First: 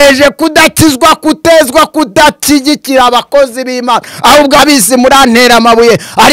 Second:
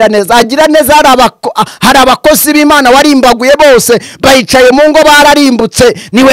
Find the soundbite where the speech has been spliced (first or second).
first